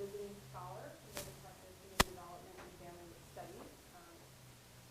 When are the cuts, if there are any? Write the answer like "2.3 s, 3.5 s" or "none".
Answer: 3.7 s